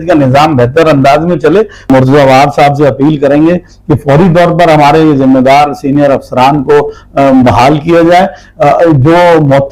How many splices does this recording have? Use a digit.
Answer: 1